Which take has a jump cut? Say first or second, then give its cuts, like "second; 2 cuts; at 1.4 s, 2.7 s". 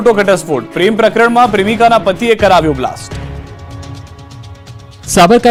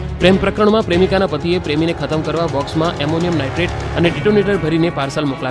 second; 1 cut; at 2.0 s